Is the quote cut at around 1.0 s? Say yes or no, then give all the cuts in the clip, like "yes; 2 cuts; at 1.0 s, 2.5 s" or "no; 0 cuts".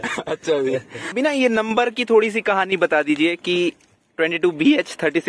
yes; 1 cut; at 1.0 s